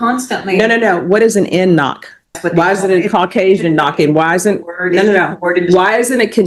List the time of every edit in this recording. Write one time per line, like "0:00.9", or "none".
0:02.4